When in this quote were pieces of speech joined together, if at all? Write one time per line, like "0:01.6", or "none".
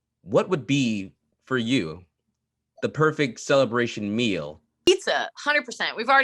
0:04.9